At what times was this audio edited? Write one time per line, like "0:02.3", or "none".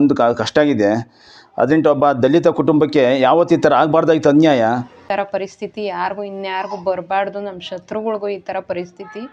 0:05.0